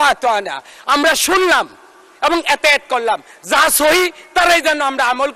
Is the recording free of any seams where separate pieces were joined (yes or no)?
yes